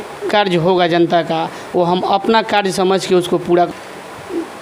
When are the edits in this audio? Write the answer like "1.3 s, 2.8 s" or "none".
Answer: 3.7 s